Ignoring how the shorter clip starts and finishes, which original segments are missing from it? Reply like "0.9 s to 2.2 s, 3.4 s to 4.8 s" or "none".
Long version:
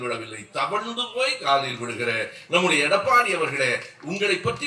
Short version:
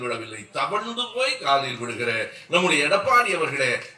none